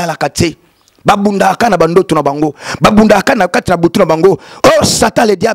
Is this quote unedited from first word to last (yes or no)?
yes